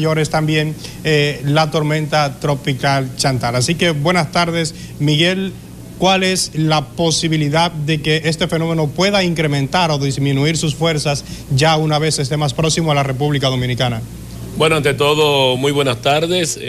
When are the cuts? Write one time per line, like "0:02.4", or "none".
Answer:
0:11.4